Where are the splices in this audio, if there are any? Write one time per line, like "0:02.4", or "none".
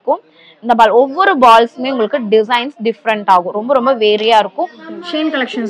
0:04.8